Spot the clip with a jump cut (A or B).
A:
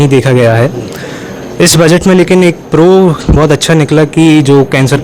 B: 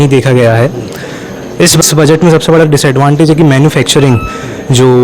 B